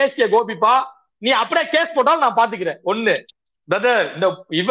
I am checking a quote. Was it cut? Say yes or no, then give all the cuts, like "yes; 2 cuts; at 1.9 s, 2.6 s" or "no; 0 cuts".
no; 0 cuts